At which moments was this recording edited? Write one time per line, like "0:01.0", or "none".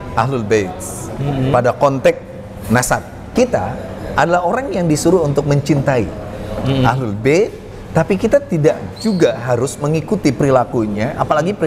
0:03.2